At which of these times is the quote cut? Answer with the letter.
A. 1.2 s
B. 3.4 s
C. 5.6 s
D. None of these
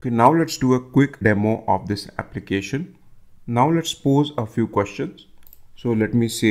A